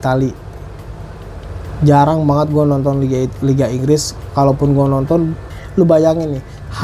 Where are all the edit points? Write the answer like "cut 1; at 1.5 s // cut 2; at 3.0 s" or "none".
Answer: cut 1; at 5.6 s